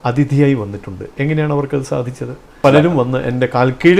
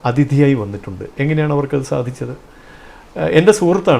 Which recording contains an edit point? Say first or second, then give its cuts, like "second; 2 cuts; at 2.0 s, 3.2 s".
first; 1 cut; at 2.6 s